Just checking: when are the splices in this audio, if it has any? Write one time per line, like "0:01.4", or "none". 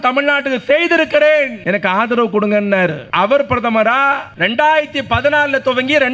0:01.6
0:03.0
0:04.3